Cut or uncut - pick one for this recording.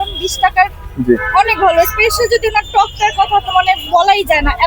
uncut